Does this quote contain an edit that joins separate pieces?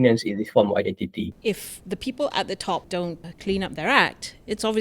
yes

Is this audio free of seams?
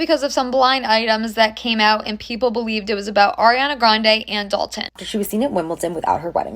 no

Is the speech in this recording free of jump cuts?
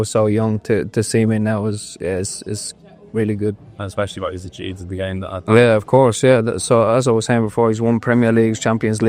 yes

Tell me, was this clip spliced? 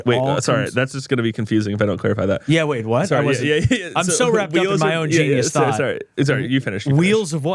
no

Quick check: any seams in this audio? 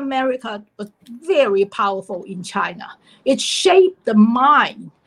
no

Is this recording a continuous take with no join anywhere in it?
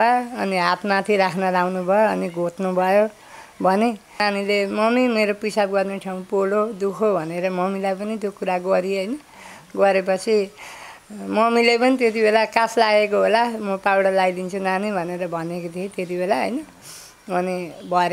no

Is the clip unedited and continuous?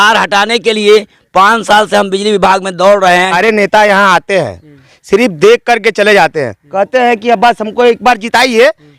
no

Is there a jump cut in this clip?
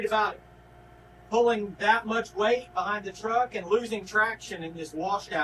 no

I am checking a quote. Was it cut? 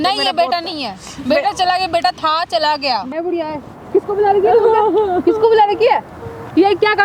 yes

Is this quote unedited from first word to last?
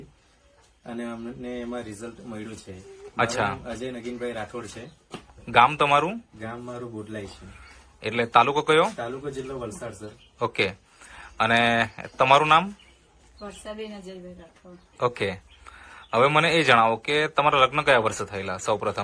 yes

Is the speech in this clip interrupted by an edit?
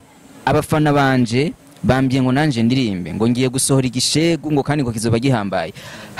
no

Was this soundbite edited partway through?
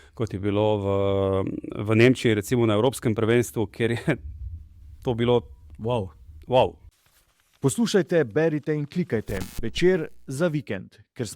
yes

